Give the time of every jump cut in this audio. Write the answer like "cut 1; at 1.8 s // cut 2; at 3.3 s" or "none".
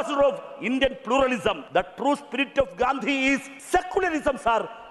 cut 1; at 1.6 s // cut 2; at 3.5 s